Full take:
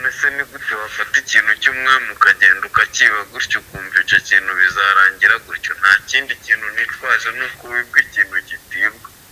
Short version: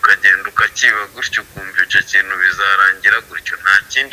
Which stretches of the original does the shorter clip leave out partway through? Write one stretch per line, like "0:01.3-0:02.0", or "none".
none